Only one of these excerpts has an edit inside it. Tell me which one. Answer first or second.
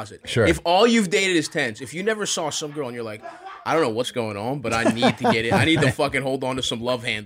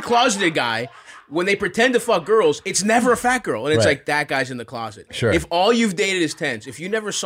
first